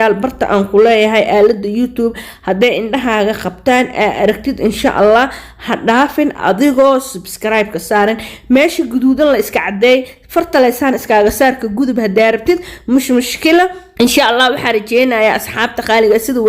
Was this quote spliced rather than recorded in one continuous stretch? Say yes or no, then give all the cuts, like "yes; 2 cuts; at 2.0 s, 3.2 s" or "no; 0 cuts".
yes; 1 cut; at 13.8 s